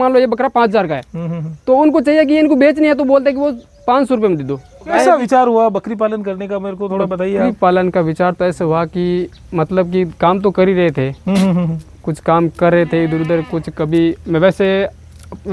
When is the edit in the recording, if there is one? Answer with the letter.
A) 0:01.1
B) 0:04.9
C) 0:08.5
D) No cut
B